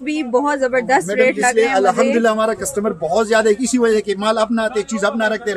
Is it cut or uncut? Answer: uncut